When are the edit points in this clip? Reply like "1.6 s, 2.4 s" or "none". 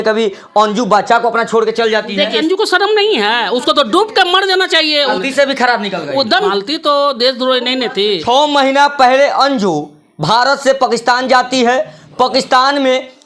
2.4 s, 5.2 s, 6.5 s, 8.2 s